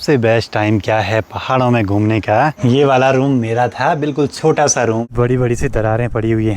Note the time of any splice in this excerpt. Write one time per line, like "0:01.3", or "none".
0:02.6
0:05.0